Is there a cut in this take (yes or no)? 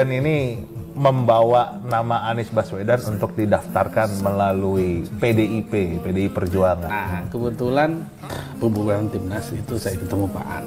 yes